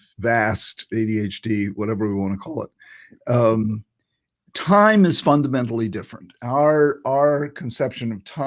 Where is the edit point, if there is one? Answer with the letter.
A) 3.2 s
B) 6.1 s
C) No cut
C